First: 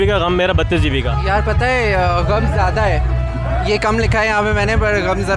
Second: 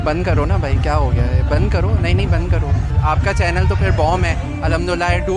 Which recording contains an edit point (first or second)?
second